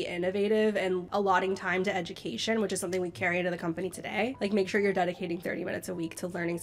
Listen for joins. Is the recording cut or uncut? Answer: cut